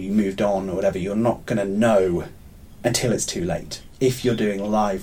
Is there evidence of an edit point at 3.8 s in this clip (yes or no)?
yes